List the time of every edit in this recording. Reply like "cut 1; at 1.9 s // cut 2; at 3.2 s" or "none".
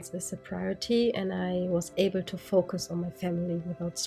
none